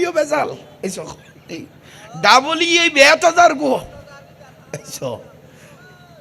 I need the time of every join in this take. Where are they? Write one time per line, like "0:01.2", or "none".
none